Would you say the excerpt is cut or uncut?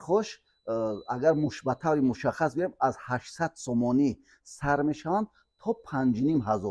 uncut